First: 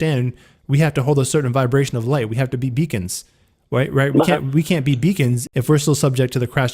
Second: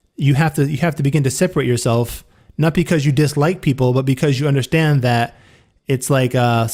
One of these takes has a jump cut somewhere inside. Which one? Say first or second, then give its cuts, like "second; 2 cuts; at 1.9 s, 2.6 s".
first; 1 cut; at 5.4 s